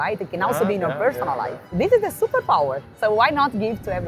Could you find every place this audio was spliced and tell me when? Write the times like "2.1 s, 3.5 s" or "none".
1.7 s, 2.9 s

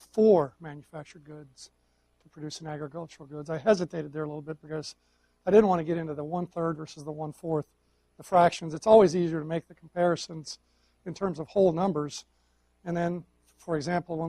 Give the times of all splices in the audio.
6.3 s

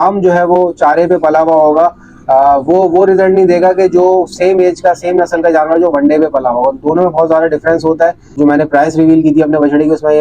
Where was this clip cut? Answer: 8.4 s

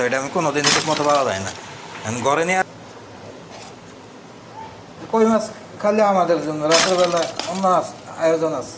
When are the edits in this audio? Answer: 2.6 s

